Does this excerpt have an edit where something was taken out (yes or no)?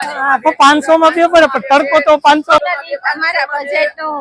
yes